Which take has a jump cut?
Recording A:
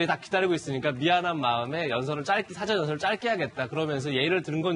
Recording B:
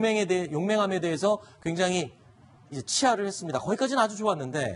B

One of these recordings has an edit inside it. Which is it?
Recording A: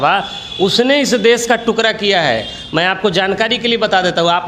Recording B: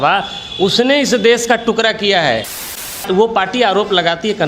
B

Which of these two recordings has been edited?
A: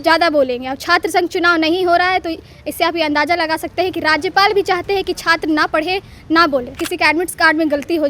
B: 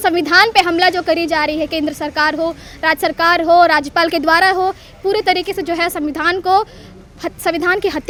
A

